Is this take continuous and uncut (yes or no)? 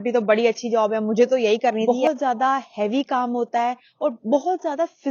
no